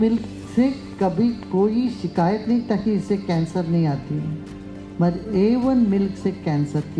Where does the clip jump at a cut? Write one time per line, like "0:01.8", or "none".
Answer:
none